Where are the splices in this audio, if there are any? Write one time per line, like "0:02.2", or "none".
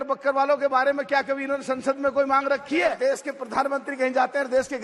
0:03.0